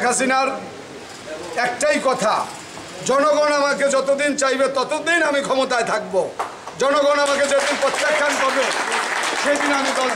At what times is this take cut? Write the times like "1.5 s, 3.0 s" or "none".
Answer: none